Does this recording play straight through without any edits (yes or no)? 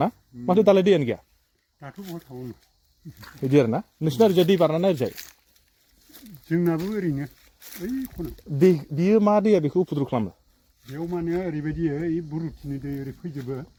yes